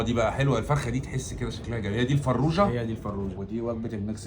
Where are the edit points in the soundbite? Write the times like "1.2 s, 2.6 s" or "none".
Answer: 3.3 s